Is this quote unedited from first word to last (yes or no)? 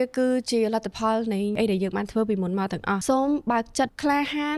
no